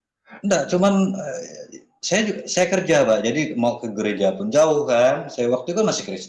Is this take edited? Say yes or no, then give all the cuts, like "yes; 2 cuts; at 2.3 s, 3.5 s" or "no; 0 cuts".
no; 0 cuts